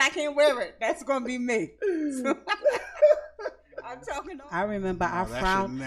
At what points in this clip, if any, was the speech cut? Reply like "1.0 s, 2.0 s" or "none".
4.1 s